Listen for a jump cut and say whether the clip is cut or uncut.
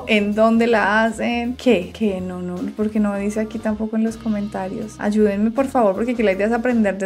uncut